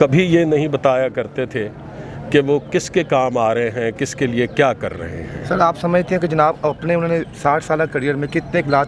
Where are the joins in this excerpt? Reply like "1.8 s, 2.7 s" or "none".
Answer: none